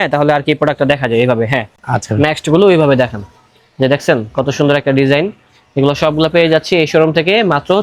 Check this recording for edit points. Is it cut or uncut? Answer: uncut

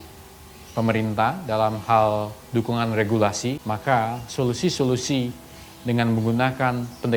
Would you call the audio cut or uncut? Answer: cut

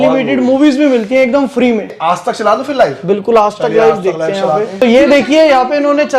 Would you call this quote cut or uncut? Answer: cut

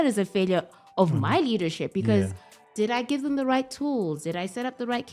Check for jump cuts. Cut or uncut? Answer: uncut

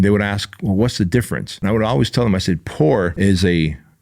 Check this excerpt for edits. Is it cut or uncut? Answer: cut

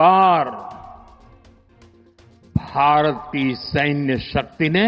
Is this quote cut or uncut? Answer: uncut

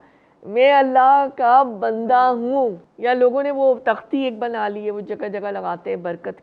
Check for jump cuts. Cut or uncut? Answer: cut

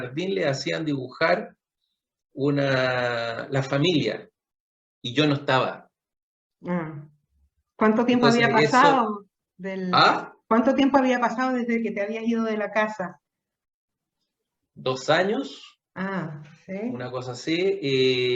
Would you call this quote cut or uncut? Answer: uncut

